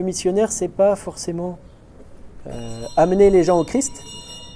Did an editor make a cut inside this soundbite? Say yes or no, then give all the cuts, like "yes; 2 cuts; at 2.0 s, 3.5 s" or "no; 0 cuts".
no; 0 cuts